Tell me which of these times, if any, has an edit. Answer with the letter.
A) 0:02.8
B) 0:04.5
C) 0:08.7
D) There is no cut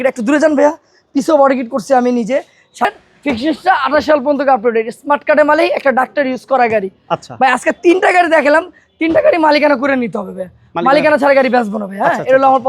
A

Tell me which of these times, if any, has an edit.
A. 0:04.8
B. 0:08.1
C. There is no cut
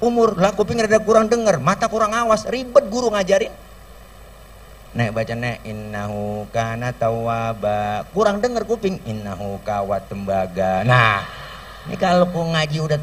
C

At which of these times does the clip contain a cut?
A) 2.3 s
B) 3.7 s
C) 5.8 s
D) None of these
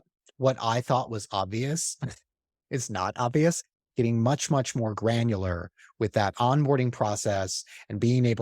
B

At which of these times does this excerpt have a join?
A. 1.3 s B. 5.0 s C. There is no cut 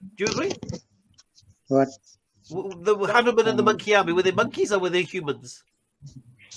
C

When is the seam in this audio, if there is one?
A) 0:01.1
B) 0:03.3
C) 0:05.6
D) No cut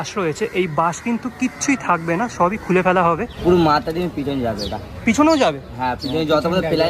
B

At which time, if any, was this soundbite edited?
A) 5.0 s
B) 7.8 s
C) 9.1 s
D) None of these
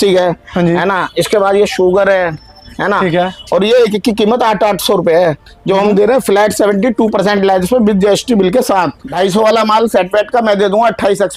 C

